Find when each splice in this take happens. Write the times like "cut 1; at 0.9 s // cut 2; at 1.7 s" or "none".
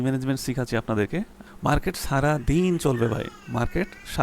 cut 1; at 1.1 s